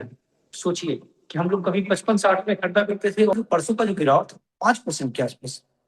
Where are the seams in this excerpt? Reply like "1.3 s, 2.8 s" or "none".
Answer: 3.3 s

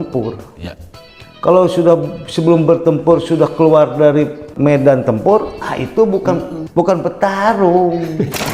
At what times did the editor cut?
4.5 s, 6.6 s

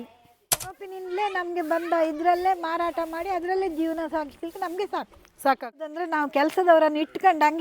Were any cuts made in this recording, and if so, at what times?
0.7 s, 6.0 s

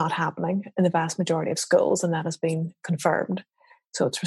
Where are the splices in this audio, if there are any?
none

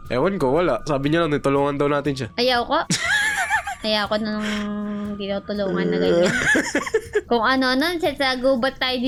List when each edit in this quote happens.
none

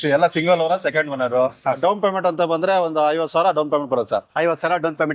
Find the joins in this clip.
1.6 s

